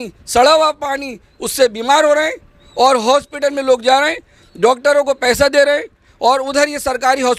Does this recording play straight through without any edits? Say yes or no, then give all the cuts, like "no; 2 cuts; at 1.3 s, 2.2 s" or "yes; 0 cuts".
yes; 0 cuts